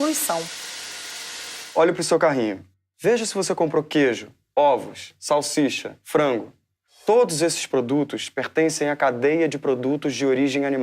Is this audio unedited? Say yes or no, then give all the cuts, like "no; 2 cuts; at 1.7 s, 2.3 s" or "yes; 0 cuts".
no; 1 cut; at 7.8 s